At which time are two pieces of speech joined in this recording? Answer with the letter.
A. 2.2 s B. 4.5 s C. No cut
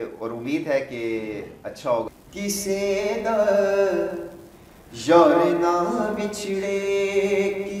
A